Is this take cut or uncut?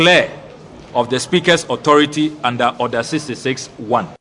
uncut